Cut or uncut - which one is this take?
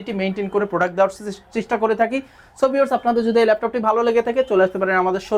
uncut